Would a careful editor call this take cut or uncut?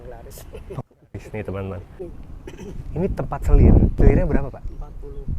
cut